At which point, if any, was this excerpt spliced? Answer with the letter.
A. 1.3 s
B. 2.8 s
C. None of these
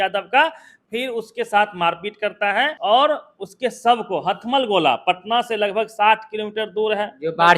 B